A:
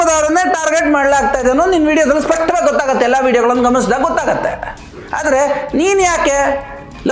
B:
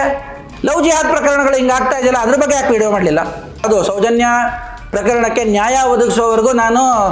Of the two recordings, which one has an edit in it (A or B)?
B